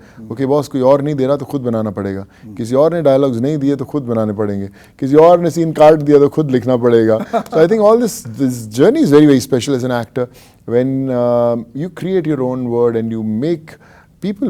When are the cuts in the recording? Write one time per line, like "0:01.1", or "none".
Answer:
none